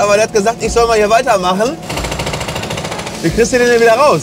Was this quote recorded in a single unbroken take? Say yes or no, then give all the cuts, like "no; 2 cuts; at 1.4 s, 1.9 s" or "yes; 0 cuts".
no; 2 cuts; at 1.9 s, 3.1 s